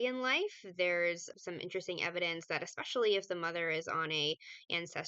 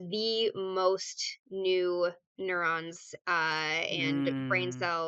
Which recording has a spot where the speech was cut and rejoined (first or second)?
first